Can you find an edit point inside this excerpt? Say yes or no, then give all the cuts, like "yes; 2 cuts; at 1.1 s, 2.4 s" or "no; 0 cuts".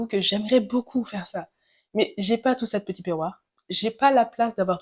no; 0 cuts